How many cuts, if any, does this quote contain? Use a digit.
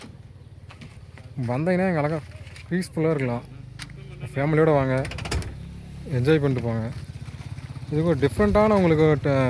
0